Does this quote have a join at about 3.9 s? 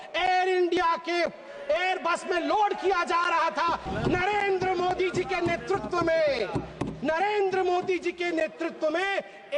yes; 1 cut; at 3.9 s

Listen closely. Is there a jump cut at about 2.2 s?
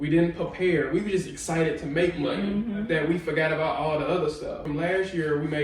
no; 1 cut; at 4.6 s

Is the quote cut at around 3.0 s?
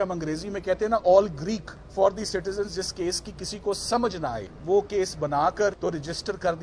no; 3 cuts; at 1.8 s, 4.5 s, 5.8 s

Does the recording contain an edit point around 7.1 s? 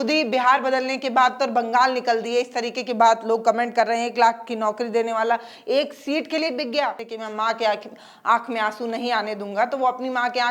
yes; 1 cut; at 7.1 s

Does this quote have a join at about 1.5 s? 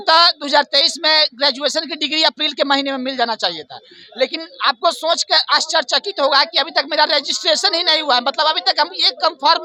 no; 0 cuts

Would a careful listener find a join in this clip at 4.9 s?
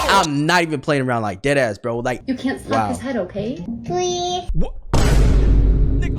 no; 2 cuts; at 2.2 s, 3.6 s

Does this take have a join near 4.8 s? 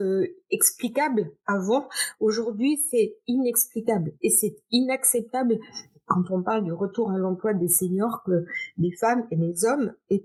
no; 0 cuts

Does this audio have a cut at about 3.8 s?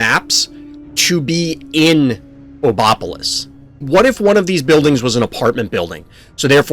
yes; 1 cut; at 3.8 s

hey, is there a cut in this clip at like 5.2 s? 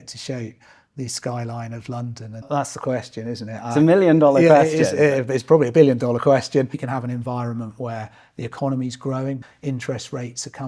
no; 3 cuts; at 2.5 s, 6.9 s, 9.4 s

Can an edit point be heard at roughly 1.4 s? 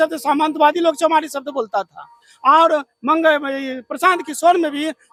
no; 0 cuts

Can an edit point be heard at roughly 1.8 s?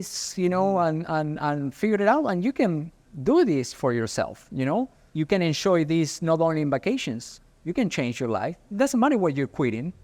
no; 1 cut; at 5.0 s

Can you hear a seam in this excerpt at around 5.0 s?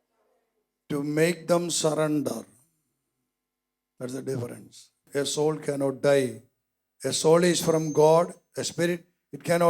yes; 1 cut; at 5.0 s

